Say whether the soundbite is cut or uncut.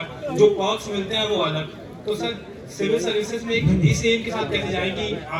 uncut